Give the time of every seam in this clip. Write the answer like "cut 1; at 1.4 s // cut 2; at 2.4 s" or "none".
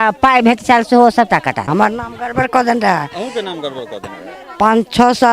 cut 1; at 1.7 s